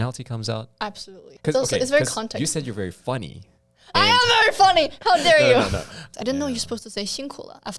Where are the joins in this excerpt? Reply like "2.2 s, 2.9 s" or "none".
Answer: 1.2 s, 6.0 s

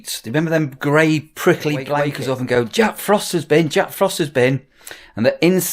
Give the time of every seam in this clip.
2.1 s

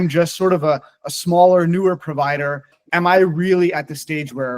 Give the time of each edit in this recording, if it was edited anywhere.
2.8 s

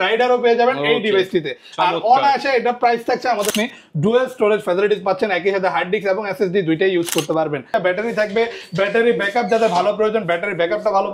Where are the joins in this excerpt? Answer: 3.5 s, 7.7 s

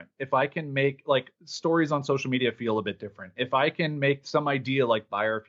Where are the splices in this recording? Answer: none

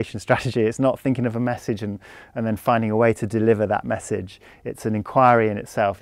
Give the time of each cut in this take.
none

